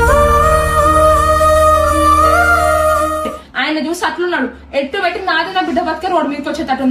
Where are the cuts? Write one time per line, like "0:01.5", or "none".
0:03.4